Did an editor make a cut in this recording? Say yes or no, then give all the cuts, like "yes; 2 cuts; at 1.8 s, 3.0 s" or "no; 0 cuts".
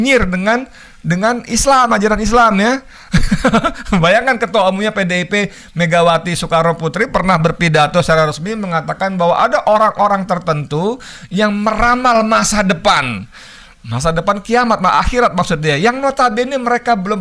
no; 0 cuts